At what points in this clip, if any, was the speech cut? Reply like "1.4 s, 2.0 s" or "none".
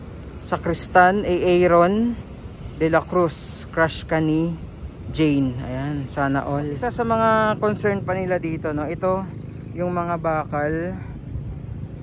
6.8 s